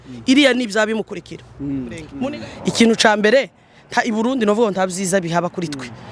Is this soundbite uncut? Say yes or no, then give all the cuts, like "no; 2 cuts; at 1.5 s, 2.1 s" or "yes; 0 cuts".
no; 1 cut; at 2.0 s